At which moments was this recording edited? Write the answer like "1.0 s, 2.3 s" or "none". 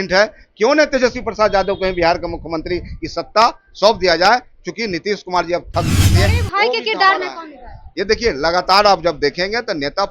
6.1 s

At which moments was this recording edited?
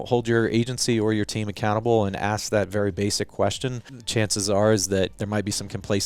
4.0 s, 5.2 s

